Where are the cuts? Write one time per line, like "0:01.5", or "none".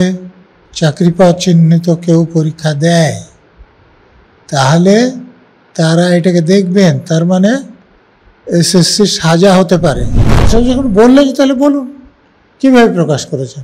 0:10.5